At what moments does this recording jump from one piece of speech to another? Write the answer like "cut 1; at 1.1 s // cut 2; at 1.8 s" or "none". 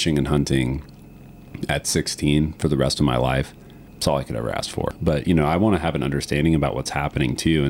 cut 1; at 4.9 s